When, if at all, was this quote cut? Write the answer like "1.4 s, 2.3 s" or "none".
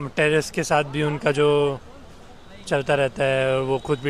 none